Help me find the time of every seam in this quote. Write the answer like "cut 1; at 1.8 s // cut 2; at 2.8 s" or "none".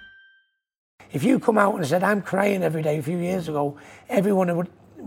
cut 1; at 0.9 s

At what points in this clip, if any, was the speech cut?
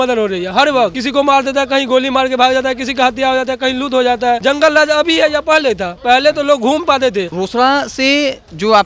cut 1; at 1.0 s // cut 2; at 4.4 s // cut 3; at 7.3 s

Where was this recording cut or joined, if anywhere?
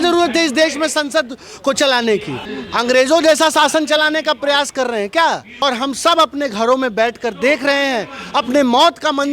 cut 1; at 2.4 s // cut 2; at 5.5 s

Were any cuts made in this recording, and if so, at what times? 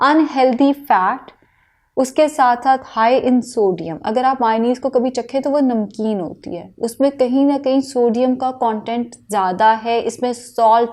none

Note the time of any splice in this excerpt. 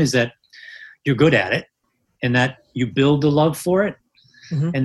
none

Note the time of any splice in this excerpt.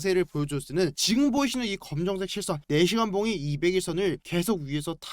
cut 1; at 1.0 s

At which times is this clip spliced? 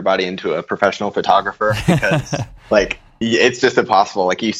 none

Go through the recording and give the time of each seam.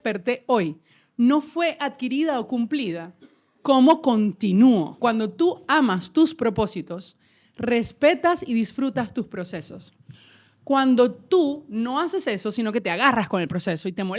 cut 1; at 4.9 s

